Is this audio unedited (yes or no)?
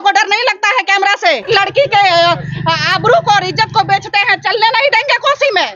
no